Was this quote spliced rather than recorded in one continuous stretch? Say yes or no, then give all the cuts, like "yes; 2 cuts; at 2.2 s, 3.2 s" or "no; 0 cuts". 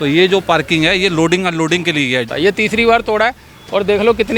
yes; 1 cut; at 2.3 s